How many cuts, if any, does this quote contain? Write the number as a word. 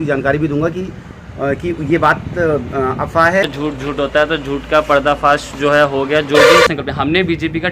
two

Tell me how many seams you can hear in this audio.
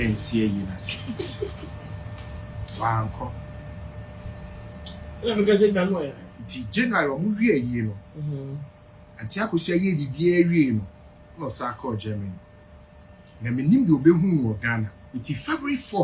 zero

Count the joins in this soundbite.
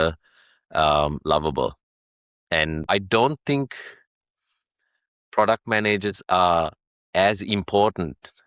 one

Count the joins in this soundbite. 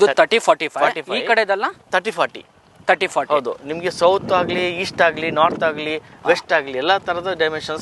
zero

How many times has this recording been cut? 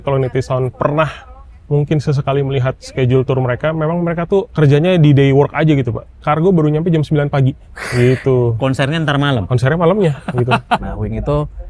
three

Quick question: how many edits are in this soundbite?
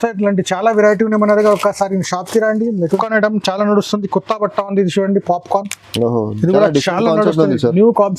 one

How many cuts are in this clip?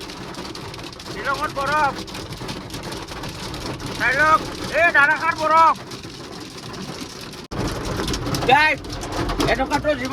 one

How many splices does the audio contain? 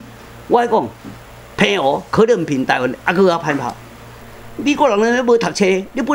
one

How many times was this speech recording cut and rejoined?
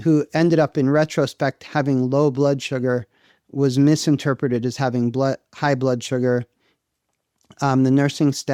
zero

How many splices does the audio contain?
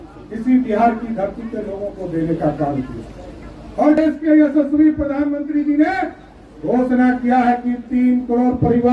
one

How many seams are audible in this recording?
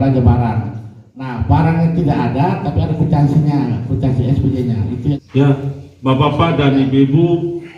one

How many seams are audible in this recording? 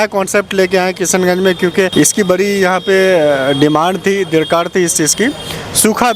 one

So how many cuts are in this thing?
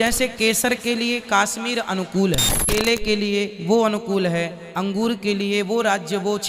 one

